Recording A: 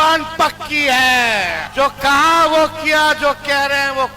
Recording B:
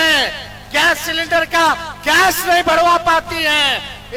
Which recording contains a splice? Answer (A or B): A